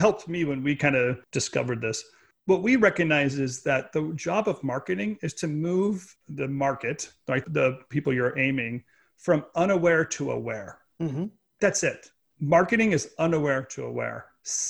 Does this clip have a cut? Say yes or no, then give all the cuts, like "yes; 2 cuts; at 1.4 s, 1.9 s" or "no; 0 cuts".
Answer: yes; 1 cut; at 6.2 s